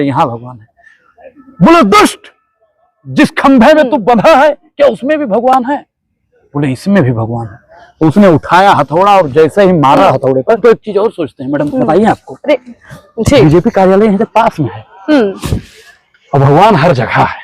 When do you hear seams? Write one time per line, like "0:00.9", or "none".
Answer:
0:10.6